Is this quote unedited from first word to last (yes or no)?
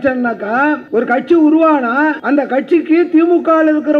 no